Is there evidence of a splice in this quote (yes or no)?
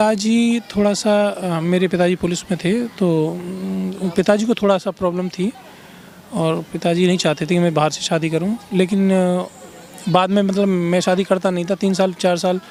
no